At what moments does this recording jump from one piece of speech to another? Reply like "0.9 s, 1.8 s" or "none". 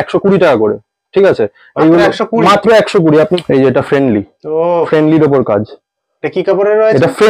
3.4 s